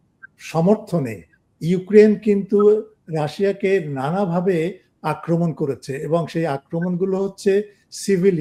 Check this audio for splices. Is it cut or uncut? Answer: uncut